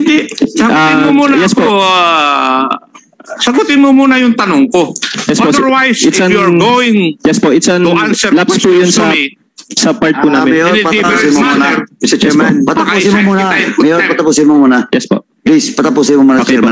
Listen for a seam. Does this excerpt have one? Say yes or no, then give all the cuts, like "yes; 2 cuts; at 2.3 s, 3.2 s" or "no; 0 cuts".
no; 0 cuts